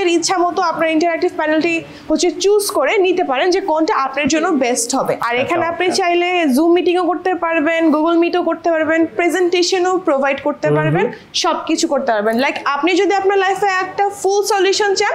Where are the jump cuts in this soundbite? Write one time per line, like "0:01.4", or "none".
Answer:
0:05.2